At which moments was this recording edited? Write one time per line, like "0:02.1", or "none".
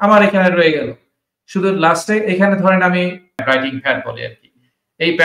0:03.4